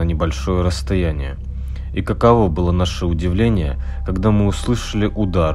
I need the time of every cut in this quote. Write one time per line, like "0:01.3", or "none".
none